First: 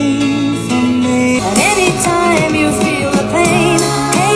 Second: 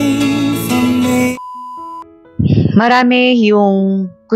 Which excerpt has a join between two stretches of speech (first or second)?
first